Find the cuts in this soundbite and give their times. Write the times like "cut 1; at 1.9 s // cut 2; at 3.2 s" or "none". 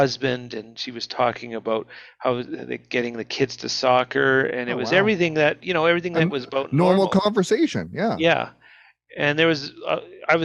none

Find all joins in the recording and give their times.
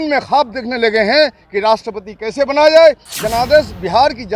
cut 1; at 3.1 s

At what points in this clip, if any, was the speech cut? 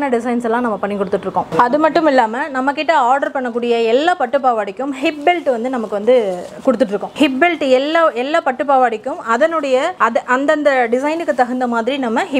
none

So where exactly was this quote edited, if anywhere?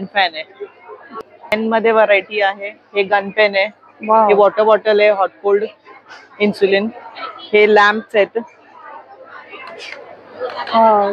cut 1; at 1.5 s

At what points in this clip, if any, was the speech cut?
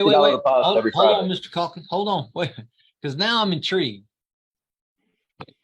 none

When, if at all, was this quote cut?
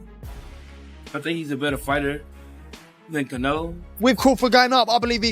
cut 1; at 3.9 s

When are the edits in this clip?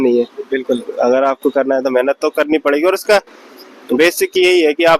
none

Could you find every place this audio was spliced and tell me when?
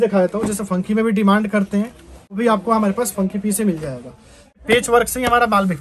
cut 1; at 2.4 s // cut 2; at 4.5 s

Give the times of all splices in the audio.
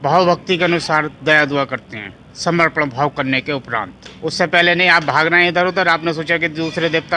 cut 1; at 4.0 s

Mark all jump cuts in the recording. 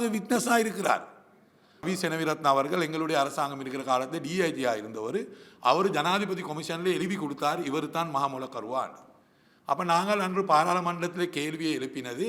cut 1; at 1.9 s

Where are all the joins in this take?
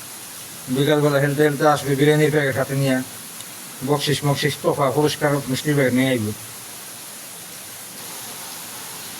cut 1; at 8.0 s

